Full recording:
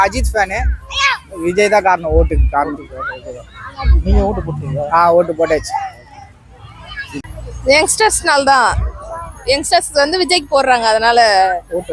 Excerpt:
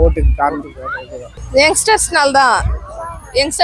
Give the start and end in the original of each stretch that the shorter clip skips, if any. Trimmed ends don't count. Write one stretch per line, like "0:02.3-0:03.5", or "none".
0:03.4-0:07.4